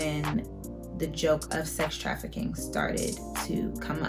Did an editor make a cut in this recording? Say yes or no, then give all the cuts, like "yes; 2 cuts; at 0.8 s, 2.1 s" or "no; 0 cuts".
no; 0 cuts